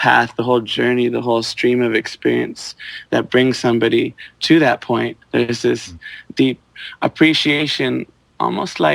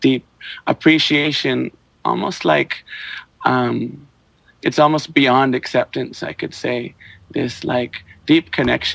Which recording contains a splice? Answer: first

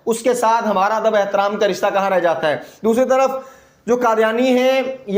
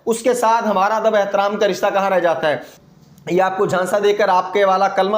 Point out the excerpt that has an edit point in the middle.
second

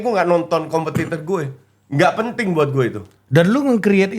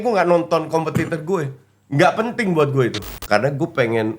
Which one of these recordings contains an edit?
second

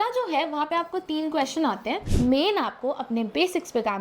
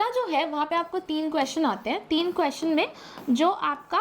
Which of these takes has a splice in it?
first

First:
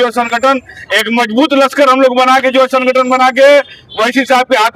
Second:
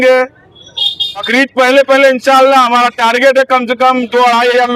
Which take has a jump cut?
second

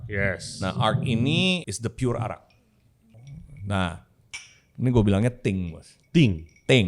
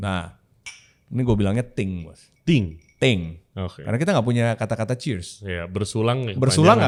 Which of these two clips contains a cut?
first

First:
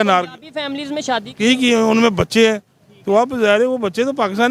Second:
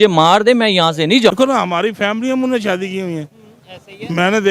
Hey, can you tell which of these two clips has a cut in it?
second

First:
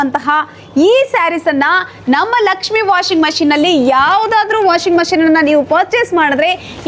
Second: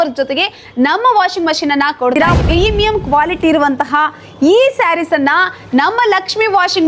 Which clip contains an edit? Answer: second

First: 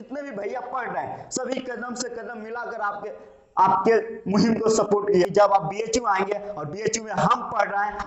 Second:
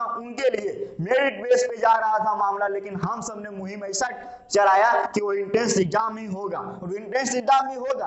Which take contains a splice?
first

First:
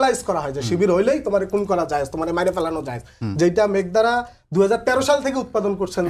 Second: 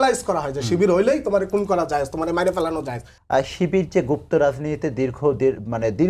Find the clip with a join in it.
second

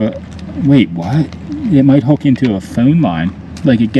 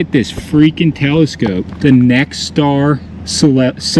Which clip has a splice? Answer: second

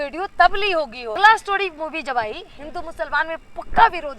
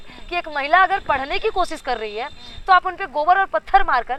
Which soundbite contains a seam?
first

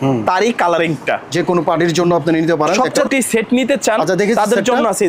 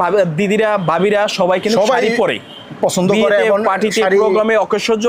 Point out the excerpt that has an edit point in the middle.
first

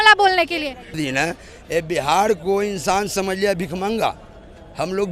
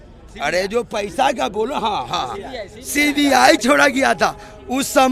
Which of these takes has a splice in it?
first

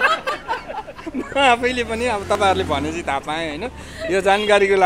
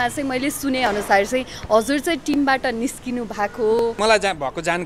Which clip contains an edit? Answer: second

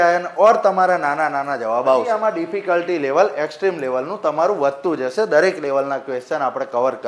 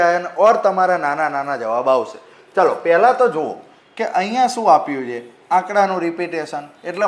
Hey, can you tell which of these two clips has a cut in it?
first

